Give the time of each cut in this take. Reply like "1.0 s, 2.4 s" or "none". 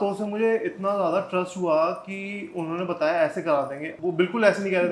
none